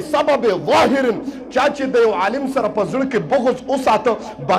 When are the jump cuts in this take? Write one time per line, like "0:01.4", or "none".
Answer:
none